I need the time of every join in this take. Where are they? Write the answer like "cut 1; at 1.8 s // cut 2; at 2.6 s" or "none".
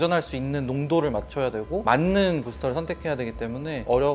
cut 1; at 1.8 s